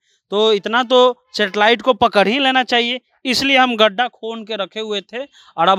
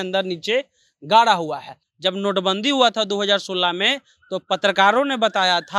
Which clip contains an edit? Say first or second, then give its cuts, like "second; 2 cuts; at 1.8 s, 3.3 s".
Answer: second; 1 cut; at 1.8 s